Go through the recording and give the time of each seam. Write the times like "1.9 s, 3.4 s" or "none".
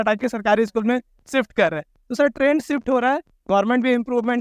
none